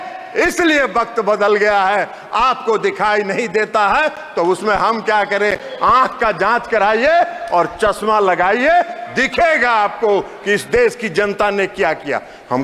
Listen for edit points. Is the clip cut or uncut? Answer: uncut